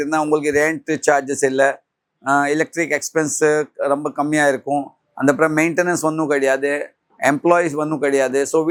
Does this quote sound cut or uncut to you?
uncut